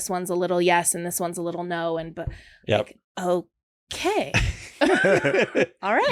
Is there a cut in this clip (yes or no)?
no